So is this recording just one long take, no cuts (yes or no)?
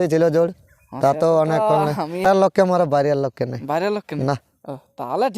no